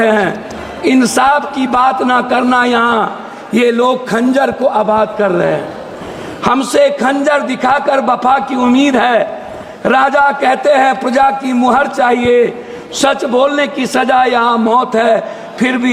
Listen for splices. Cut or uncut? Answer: uncut